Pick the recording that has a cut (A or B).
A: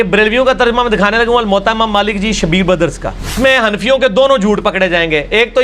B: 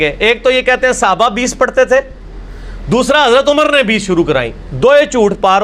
A